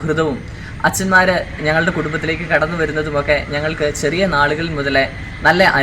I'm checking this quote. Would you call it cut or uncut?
uncut